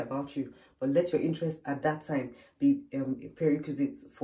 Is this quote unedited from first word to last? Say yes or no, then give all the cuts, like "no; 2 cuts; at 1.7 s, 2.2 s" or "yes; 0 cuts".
yes; 0 cuts